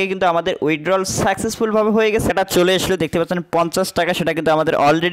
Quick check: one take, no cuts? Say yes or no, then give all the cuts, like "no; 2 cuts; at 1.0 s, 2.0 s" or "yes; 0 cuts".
no; 1 cut; at 2.3 s